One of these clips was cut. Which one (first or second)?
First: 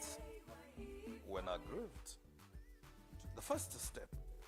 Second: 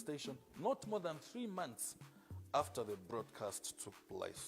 second